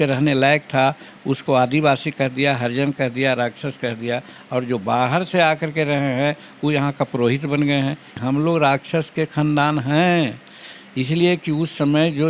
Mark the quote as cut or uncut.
cut